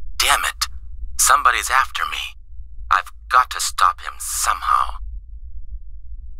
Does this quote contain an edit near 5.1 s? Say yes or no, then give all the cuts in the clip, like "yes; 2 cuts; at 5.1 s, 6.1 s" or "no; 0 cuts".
yes; 1 cut; at 5.1 s